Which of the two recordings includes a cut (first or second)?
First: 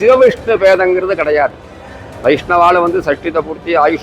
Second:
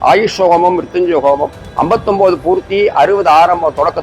second